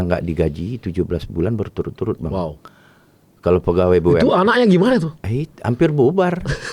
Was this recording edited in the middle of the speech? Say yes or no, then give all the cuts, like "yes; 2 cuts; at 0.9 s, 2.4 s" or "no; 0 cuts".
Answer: no; 0 cuts